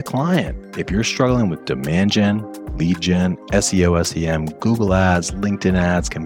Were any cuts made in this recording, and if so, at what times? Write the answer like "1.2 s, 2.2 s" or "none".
none